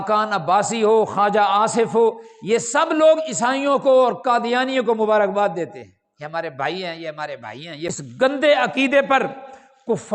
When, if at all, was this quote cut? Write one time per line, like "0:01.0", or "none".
0:07.8